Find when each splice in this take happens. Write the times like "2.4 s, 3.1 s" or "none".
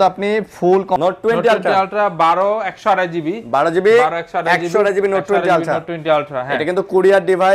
1.0 s